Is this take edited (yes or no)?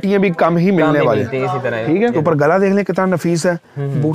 no